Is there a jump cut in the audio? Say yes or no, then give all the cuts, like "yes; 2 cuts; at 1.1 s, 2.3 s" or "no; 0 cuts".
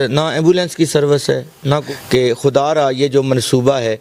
yes; 1 cut; at 1.9 s